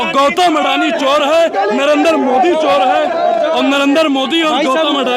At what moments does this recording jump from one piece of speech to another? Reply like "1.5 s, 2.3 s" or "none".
none